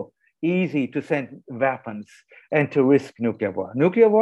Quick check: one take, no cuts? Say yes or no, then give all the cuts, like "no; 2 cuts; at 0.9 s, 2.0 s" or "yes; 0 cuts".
yes; 0 cuts